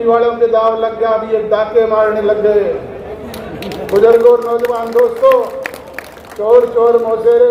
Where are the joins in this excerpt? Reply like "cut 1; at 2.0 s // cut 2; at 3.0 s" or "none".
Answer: none